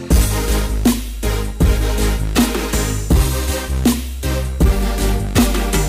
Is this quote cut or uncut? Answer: uncut